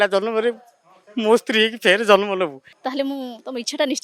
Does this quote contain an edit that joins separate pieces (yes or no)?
yes